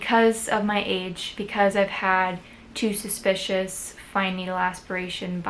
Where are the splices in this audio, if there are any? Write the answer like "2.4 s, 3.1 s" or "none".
none